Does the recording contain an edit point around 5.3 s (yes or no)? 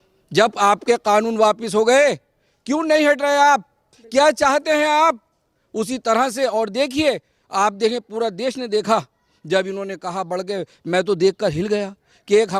no